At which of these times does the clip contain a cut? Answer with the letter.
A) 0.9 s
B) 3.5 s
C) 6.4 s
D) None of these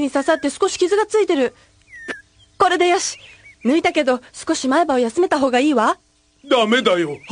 B